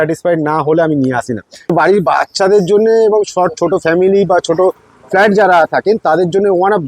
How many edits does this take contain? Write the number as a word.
one